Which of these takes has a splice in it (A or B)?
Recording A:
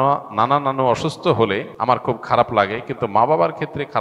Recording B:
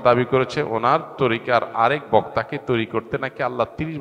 A